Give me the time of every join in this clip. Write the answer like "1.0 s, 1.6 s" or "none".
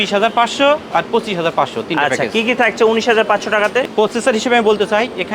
3.9 s